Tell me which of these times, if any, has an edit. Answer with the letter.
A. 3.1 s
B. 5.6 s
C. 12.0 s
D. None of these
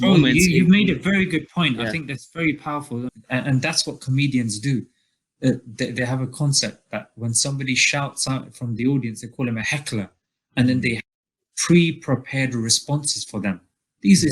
A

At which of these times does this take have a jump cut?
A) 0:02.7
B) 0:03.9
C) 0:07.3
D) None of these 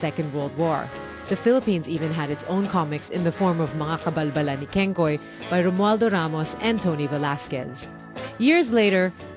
A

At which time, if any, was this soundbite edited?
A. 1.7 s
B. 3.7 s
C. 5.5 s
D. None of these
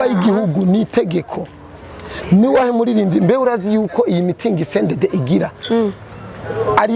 D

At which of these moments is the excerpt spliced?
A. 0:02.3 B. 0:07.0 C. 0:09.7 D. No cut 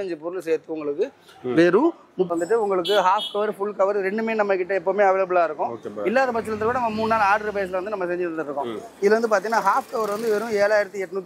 A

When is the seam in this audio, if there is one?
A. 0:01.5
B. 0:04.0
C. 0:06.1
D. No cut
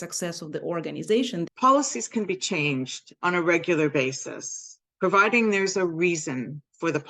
A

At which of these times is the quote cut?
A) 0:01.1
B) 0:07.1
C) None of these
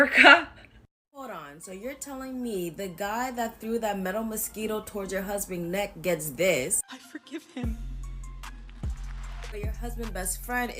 A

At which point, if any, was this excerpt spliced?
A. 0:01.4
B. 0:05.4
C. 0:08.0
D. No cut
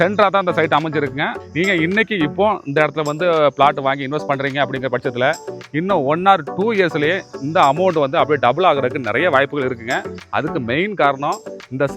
A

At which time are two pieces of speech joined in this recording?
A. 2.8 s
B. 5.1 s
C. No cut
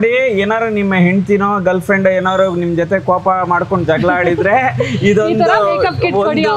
C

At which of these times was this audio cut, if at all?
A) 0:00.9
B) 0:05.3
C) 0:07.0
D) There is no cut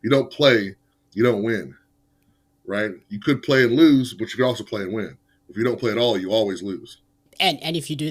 D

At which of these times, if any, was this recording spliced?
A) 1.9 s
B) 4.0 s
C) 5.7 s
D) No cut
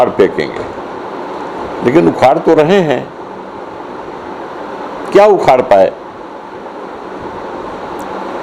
D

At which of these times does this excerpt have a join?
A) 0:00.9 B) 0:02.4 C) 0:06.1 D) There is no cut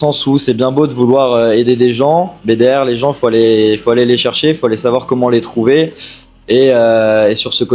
D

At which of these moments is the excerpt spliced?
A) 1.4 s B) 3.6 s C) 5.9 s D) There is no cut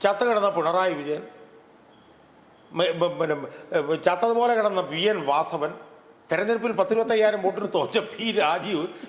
D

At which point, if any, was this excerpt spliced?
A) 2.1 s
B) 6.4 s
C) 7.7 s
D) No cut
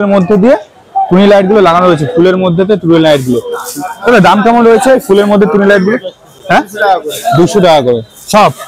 D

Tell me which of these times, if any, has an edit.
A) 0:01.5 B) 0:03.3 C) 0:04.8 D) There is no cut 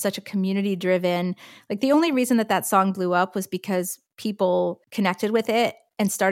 C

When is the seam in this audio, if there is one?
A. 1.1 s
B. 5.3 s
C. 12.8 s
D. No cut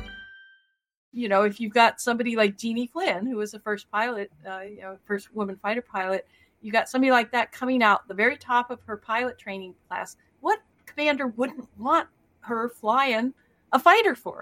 A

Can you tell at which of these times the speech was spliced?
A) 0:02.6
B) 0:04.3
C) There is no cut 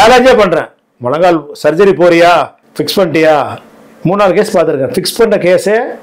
A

